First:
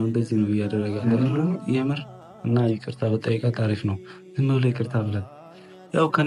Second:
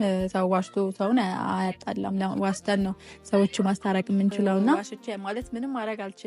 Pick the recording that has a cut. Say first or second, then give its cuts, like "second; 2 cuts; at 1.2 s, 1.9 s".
second; 1 cut; at 4.9 s